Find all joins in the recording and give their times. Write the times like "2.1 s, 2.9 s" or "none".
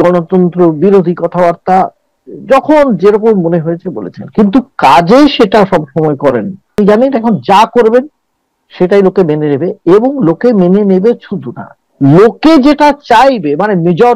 6.8 s